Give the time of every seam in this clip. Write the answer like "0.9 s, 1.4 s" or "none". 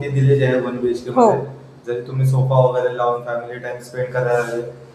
none

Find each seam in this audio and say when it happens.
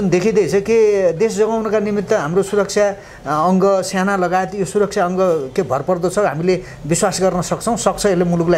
none

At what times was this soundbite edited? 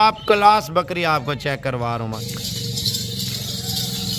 2.2 s

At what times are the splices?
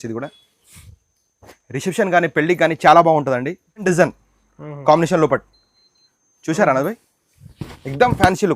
3.8 s

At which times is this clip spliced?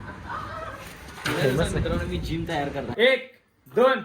3.0 s

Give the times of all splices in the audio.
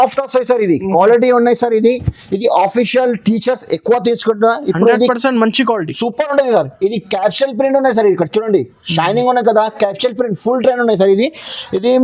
none

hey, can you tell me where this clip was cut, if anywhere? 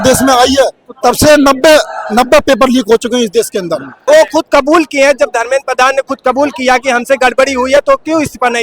3.9 s

